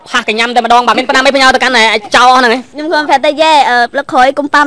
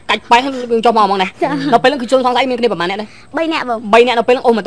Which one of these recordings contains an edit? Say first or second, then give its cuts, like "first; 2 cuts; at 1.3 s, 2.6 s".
first; 2 cuts; at 1.0 s, 2.7 s